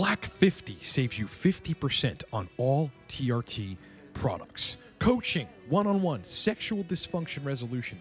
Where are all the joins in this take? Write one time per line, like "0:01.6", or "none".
none